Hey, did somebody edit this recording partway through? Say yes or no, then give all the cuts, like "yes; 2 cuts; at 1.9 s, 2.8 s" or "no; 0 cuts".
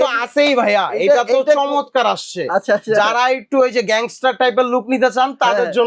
no; 0 cuts